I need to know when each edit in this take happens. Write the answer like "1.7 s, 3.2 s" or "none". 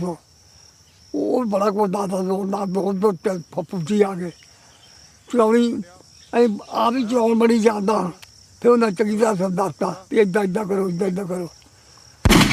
3.1 s

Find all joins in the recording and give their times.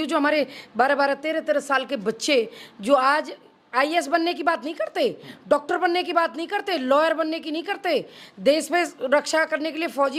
none

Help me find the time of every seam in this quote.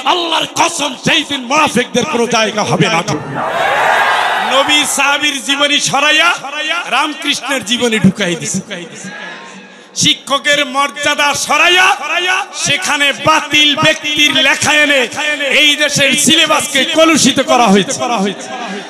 4.5 s

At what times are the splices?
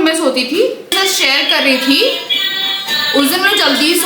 0.9 s

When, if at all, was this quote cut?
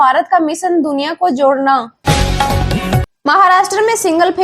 1.9 s

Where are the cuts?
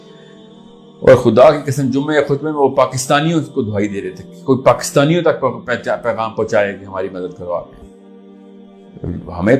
7.8 s

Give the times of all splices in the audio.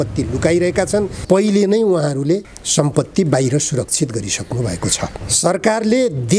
1.1 s, 5.2 s

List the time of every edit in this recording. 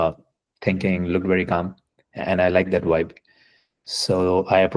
none

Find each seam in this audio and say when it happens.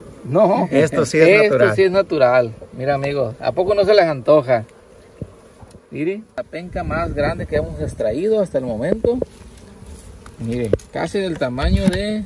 6.4 s

